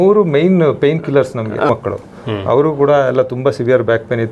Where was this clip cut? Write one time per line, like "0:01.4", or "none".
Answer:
0:01.7